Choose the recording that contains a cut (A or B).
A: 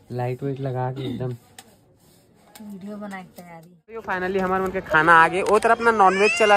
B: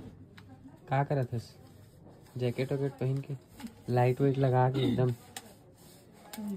A